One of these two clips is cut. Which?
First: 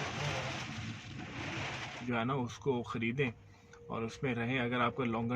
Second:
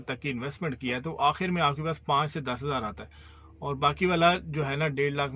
first; 1 cut; at 2.0 s

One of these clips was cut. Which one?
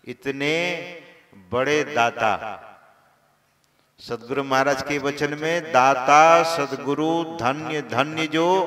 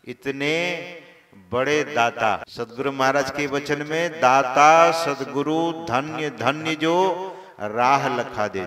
second; 1 cut; at 2.5 s

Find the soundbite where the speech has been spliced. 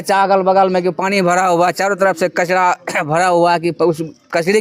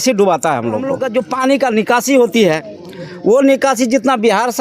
second; 1 cut; at 1.0 s

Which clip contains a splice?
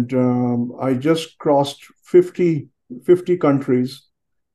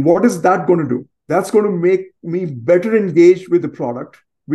second; 1 cut; at 1.1 s

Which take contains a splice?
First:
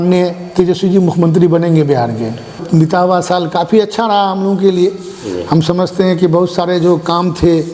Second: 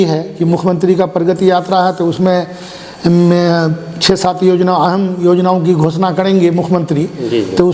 first; 1 cut; at 2.6 s

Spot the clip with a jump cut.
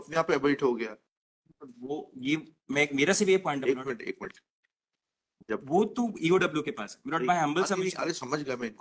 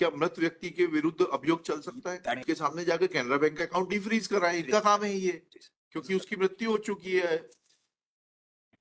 second; 1 cut; at 2.4 s

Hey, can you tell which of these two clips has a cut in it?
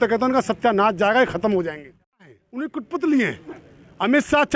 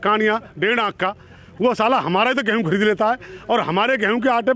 first; 1 cut; at 2.2 s

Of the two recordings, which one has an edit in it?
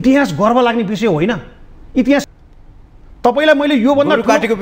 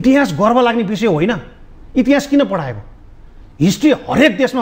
first; 1 cut; at 2.3 s

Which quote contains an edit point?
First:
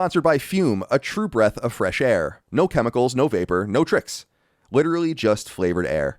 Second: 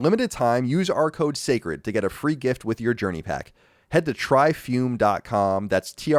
first; 1 cut; at 2.4 s

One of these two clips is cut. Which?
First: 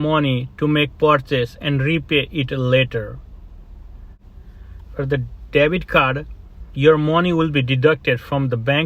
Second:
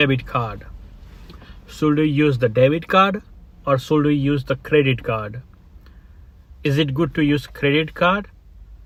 first; 1 cut; at 4.2 s

